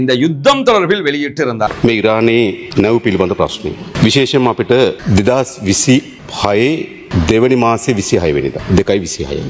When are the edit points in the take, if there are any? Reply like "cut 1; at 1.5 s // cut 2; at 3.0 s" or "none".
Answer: cut 1; at 1.7 s // cut 2; at 2.6 s // cut 3; at 3.9 s // cut 4; at 5.0 s // cut 5; at 6.2 s // cut 6; at 7.0 s // cut 7; at 8.6 s